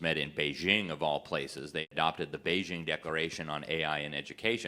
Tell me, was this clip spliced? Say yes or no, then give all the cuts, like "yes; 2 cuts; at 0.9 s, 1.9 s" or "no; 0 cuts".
yes; 1 cut; at 1.9 s